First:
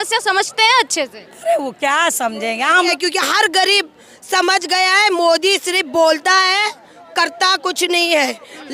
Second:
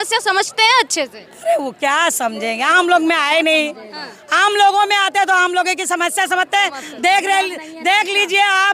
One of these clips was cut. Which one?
first; 1 cut; at 2.9 s

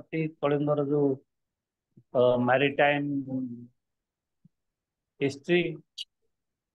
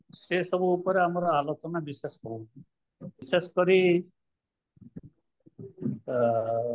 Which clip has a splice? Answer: second; 1 cut; at 3.3 s

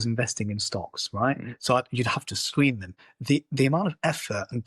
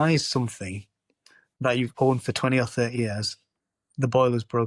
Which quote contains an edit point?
first; 1 cut; at 3.1 s

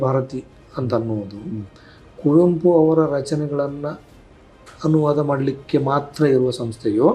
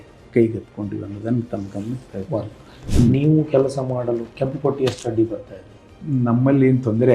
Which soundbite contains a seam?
second; 2 cuts; at 2.8 s, 5.9 s

